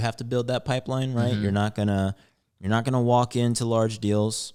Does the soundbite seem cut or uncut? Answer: uncut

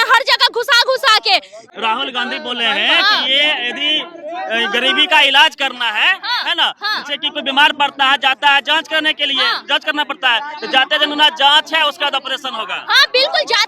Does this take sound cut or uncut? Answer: uncut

